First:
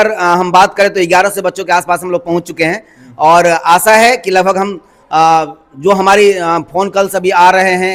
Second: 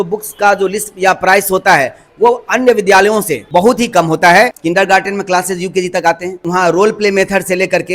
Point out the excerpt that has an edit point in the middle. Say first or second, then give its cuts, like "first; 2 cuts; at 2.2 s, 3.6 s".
second; 3 cuts; at 3.4 s, 4.6 s, 6.4 s